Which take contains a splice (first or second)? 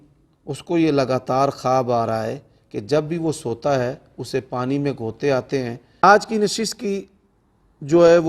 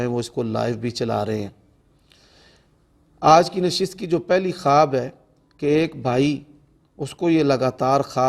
first